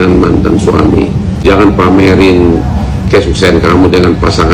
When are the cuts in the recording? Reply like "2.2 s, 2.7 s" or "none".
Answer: 1.4 s